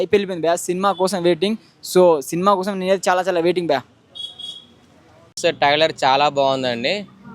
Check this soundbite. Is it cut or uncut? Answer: cut